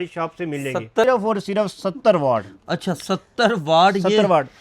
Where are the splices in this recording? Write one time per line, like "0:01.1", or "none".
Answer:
0:01.1